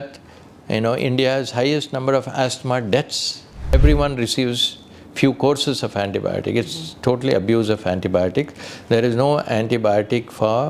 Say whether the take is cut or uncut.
cut